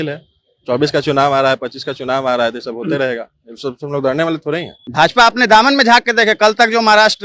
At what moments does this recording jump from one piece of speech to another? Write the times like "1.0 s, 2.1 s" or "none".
4.8 s